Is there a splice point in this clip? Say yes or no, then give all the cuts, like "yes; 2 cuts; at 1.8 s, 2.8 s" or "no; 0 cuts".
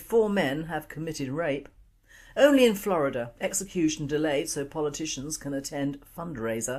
no; 0 cuts